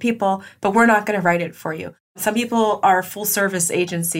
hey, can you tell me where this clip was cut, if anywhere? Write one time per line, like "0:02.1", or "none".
0:02.1